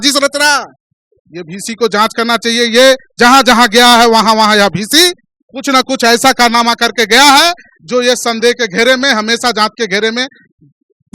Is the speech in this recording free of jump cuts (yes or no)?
yes